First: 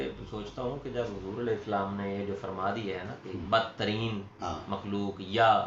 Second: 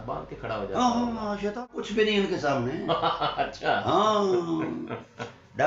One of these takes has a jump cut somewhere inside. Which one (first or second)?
second